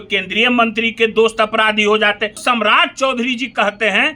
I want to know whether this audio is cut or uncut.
cut